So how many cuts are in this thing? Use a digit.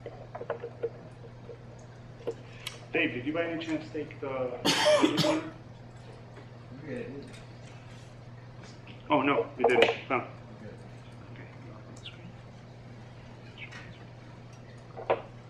1